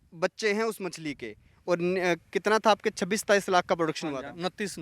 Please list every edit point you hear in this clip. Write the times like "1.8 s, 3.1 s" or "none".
1.5 s